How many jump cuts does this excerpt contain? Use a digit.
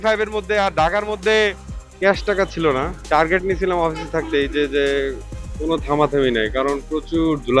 2